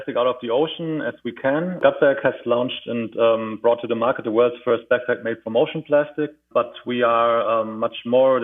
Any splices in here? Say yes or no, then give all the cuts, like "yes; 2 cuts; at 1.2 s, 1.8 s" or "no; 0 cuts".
yes; 2 cuts; at 1.8 s, 6.4 s